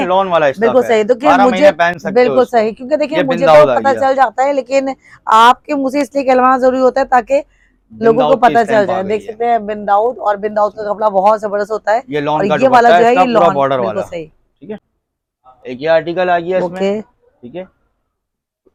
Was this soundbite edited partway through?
no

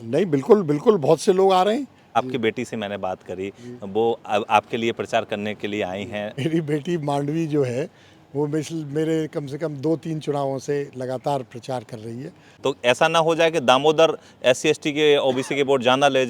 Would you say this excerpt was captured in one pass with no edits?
no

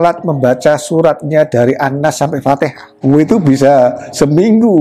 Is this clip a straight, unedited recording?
no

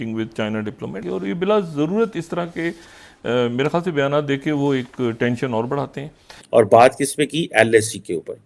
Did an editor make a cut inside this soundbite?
yes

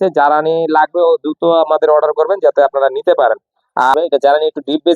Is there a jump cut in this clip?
yes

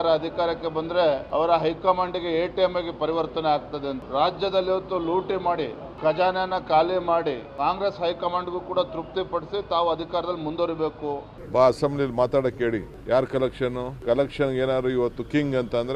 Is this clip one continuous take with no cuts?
no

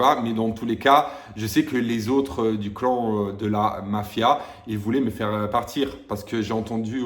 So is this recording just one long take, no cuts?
yes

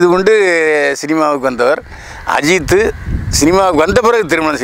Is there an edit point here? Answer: no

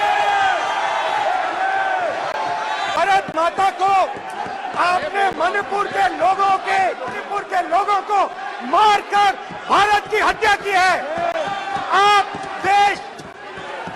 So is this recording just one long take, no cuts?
no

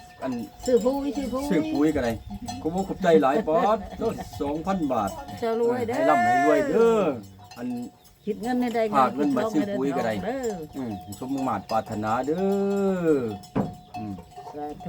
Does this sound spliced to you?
yes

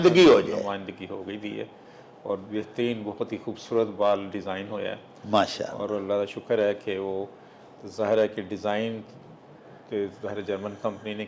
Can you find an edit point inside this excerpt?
no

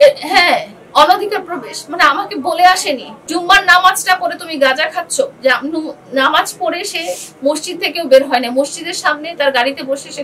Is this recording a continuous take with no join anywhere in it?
no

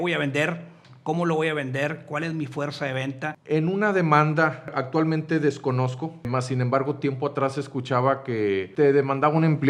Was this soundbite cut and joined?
yes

